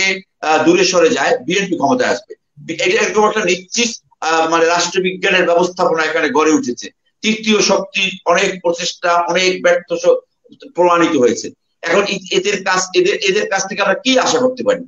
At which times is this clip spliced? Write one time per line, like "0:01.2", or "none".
none